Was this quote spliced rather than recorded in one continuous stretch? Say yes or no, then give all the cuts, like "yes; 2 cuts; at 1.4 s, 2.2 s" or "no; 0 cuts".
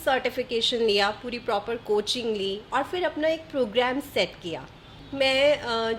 yes; 1 cut; at 5.0 s